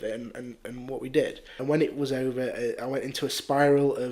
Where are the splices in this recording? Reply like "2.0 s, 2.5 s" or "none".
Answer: 1.5 s